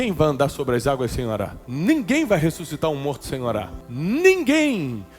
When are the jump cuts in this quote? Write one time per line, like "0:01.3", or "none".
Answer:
0:01.6
0:03.8